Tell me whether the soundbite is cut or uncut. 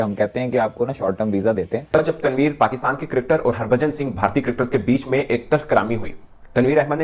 cut